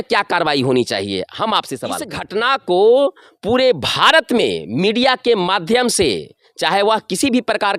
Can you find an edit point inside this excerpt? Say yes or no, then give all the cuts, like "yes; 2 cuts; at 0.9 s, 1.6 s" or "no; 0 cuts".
yes; 1 cut; at 2.2 s